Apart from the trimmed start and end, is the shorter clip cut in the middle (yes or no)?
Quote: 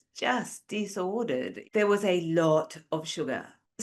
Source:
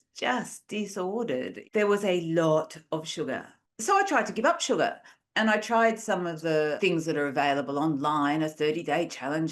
no